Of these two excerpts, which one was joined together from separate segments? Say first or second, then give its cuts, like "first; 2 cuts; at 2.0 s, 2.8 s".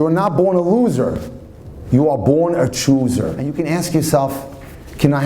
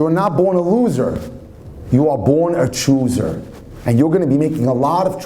first; 1 cut; at 3.5 s